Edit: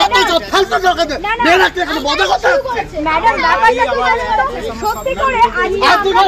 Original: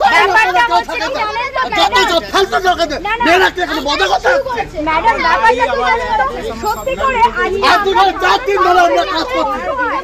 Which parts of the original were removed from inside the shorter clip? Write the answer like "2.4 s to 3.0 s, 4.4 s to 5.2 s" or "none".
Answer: none